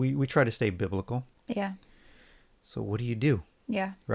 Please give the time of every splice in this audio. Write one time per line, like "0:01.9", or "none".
0:01.3